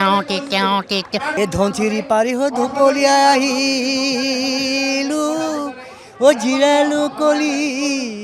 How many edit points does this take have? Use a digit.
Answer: 1